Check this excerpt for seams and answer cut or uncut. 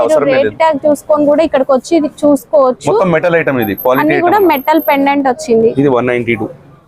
uncut